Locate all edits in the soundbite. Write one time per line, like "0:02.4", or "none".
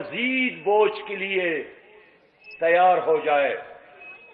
none